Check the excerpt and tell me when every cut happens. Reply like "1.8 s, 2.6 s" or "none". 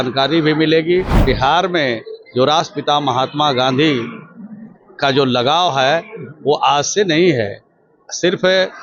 1.2 s